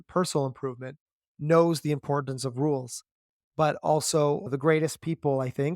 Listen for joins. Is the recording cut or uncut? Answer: cut